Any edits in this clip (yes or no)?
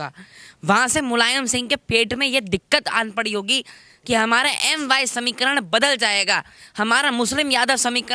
no